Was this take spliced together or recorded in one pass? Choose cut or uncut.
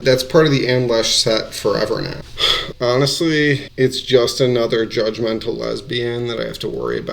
cut